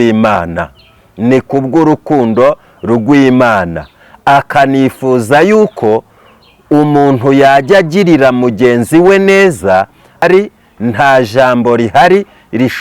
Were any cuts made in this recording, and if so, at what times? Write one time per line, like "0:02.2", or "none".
0:10.2